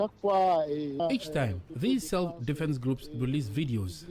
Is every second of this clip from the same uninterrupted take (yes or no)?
no